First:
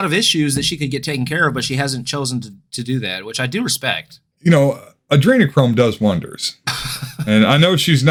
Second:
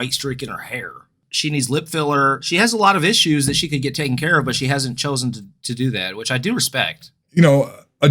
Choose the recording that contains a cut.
second; 1 cut; at 1.2 s

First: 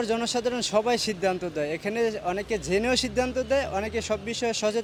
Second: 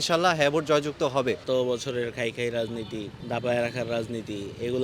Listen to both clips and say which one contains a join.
second; 2 cuts; at 1.4 s, 3.1 s

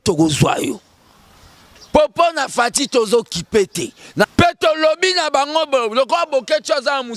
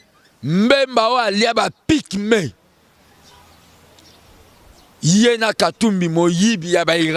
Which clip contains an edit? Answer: first; 1 cut; at 4.3 s

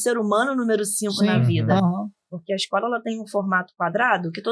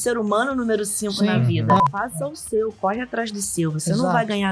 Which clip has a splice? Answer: second; 1 cut; at 1.8 s

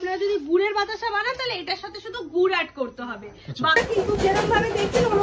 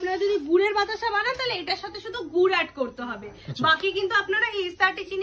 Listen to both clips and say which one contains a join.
first; 1 cut; at 3.8 s

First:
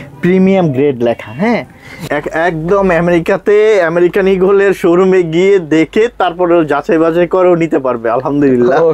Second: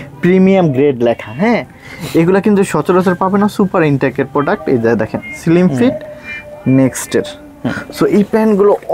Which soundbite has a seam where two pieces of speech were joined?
first; 1 cut; at 2.1 s

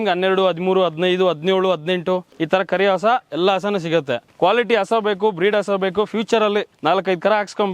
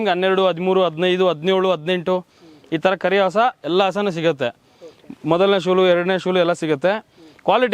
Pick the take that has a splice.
first; 3 cuts; at 2.3 s, 4.2 s, 6.7 s

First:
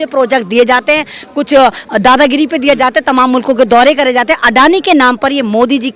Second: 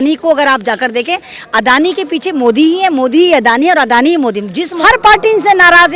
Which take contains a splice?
second; 1 cut; at 4.7 s

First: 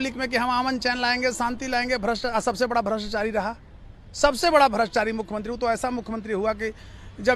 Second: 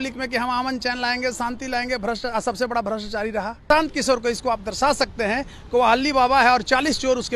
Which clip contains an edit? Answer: second; 1 cut; at 3.6 s

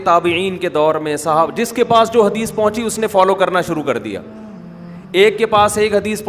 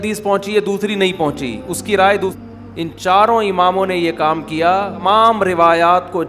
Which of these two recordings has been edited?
second; 2 cuts; at 2.3 s, 5.0 s

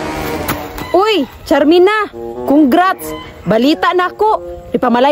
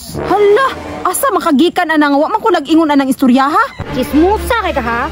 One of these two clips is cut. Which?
second; 1 cut; at 3.8 s

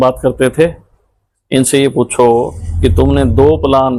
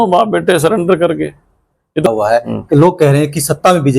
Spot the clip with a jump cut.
second; 1 cut; at 2.1 s

